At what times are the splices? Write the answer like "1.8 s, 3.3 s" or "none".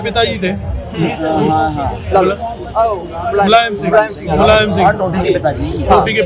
none